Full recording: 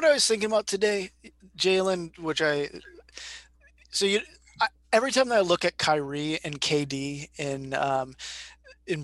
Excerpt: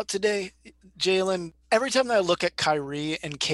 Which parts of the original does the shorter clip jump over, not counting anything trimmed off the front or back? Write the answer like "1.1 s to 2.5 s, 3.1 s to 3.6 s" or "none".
2.2 s to 4.8 s